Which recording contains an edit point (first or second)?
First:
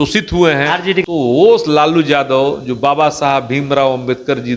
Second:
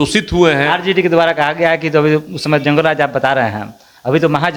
first